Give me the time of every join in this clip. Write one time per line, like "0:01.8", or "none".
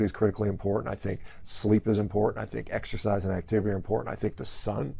none

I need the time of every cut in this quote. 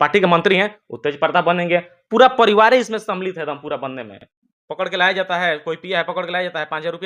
0:04.1

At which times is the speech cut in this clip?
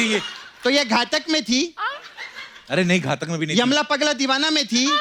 none

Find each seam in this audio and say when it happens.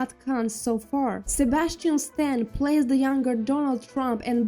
0:01.2

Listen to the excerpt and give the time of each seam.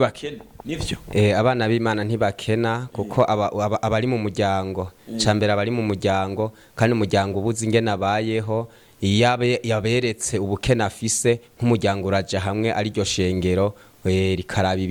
none

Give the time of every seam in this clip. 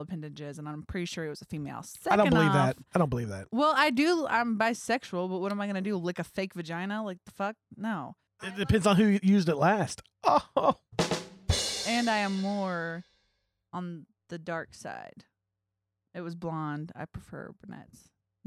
0:08.7

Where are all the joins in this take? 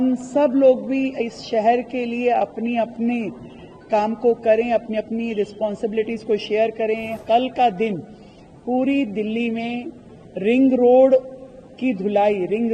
0:07.2

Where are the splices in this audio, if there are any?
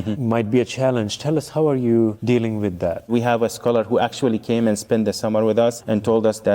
0:03.1

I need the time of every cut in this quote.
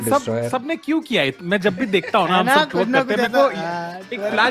none

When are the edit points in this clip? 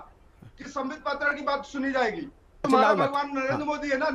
0:02.7

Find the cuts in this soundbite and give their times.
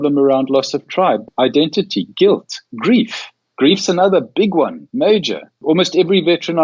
0:01.3
0:04.8
0:05.6

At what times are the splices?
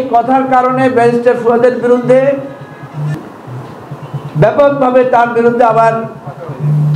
0:03.1

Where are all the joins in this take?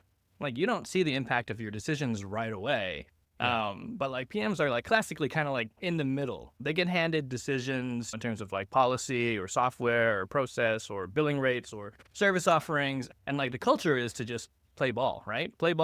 none

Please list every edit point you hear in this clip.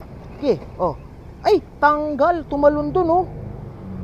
0:02.1

